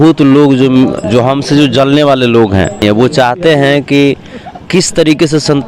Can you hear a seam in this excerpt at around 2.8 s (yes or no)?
yes